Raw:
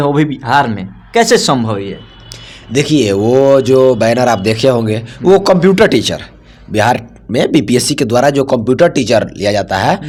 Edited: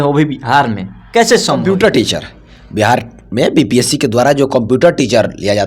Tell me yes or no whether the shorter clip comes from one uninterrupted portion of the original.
no